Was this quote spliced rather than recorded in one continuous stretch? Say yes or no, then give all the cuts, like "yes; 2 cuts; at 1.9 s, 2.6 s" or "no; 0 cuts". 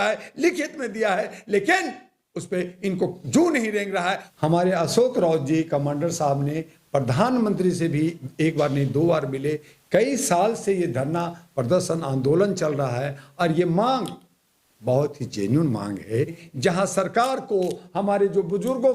yes; 2 cuts; at 4.2 s, 16.5 s